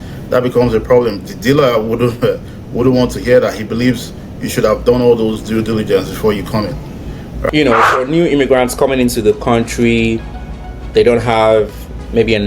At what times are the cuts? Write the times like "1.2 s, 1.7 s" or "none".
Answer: 7.5 s